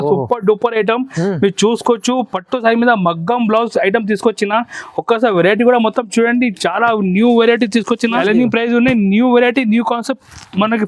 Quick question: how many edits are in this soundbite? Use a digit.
1